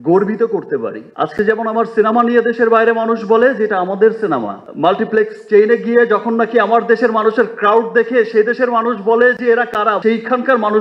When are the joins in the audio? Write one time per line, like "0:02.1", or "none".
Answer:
0:01.0
0:04.6